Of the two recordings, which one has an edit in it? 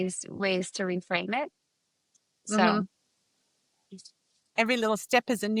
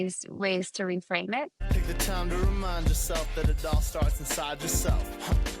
second; 1 cut; at 1.6 s

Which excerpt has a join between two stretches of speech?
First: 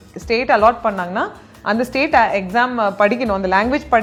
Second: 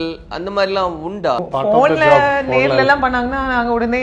second; 1 cut; at 1.4 s

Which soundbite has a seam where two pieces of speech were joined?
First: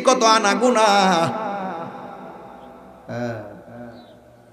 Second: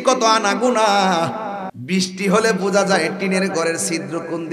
second; 1 cut; at 1.7 s

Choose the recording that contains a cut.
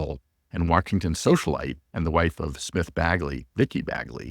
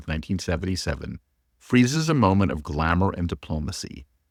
first; 1 cut; at 1.8 s

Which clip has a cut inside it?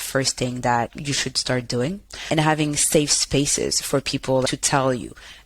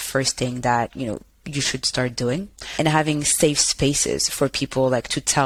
first; 2 cuts; at 0.9 s, 4.5 s

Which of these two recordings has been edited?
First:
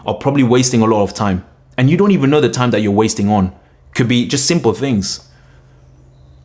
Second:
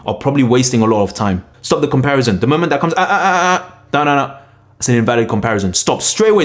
second; 1 cut; at 1.5 s

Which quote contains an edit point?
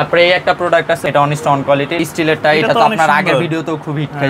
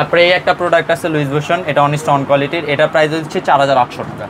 first; 2 cuts; at 1.0 s, 2.0 s

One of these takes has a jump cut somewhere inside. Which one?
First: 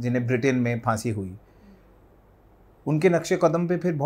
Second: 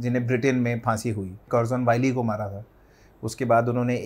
second; 1 cut; at 1.5 s

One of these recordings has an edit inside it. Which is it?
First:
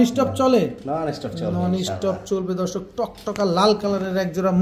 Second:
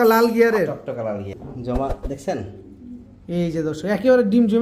second; 1 cut; at 1.3 s

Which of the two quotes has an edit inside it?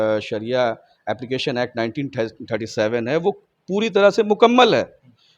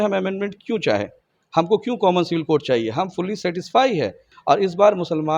second; 1 cut; at 4.3 s

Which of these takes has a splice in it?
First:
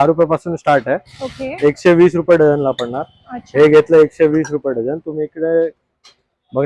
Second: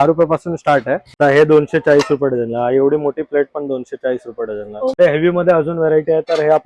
second; 2 cuts; at 1.1 s, 5.0 s

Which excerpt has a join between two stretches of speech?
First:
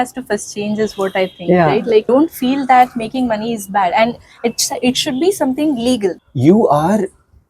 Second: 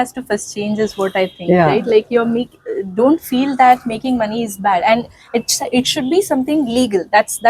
first; 2 cuts; at 2.1 s, 6.2 s

